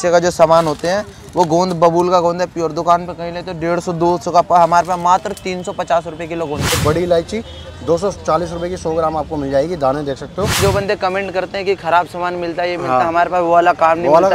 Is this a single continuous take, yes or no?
no